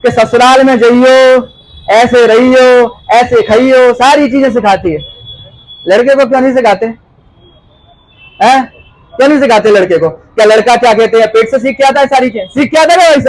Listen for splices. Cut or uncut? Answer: uncut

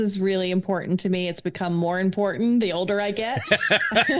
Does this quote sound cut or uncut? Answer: uncut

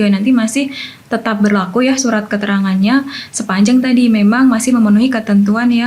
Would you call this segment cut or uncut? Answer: uncut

